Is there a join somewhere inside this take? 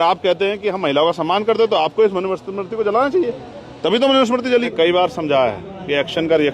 yes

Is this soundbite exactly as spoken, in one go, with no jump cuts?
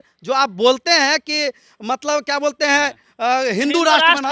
yes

